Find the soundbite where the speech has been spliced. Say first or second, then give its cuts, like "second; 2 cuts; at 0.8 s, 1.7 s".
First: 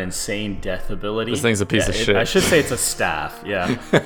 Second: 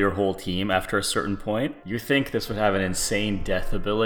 second; 1 cut; at 1.8 s